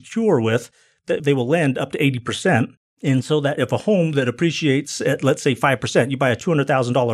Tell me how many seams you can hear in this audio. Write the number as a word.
one